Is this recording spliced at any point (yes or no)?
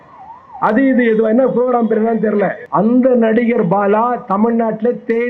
yes